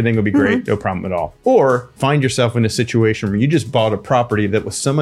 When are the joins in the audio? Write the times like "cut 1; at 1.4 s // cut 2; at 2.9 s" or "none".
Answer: cut 1; at 1.3 s // cut 2; at 2.0 s